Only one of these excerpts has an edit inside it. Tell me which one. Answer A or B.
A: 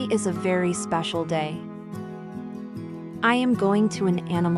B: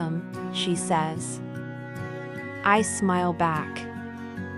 A